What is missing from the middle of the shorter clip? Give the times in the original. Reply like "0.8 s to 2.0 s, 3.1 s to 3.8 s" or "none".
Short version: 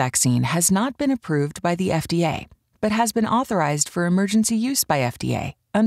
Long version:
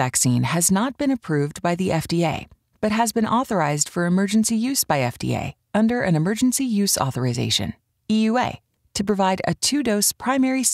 none